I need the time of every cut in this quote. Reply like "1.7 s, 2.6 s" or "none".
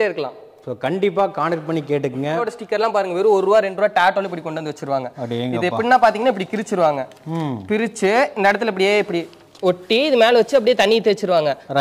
2.4 s

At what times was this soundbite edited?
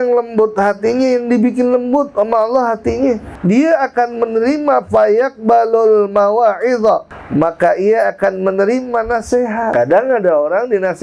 3.3 s, 7.2 s, 9.7 s

